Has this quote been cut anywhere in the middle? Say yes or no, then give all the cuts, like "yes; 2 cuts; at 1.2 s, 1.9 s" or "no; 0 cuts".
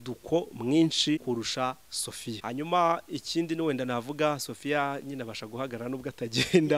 yes; 2 cuts; at 1.2 s, 2.4 s